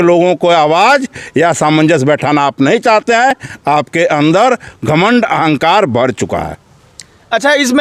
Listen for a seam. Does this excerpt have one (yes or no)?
no